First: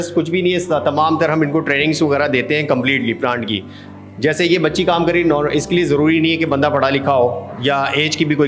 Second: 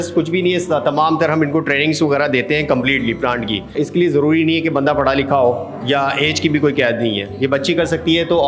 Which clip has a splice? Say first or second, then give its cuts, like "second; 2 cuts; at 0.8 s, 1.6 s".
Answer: second; 1 cut; at 3.7 s